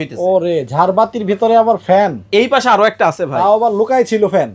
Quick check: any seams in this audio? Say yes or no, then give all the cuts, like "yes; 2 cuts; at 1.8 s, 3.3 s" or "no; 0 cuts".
no; 0 cuts